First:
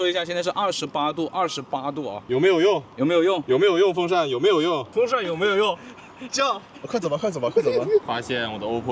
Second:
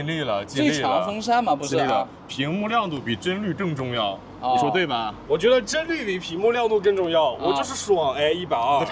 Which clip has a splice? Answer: first; 3 cuts; at 2.2 s, 4.9 s, 8.0 s

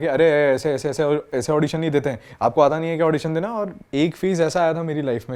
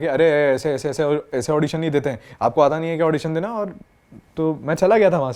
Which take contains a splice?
first; 1 cut; at 3.8 s

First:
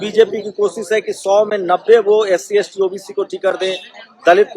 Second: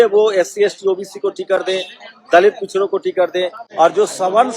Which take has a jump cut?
second; 1 cut; at 3.6 s

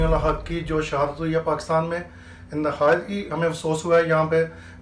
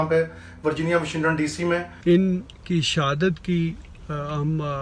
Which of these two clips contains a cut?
second; 1 cut; at 1.9 s

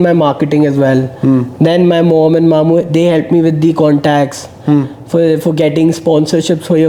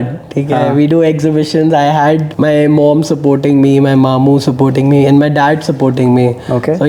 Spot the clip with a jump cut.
second; 1 cut; at 2.3 s

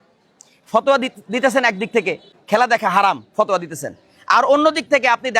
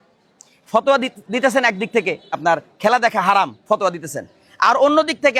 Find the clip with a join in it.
first; 1 cut; at 2.3 s

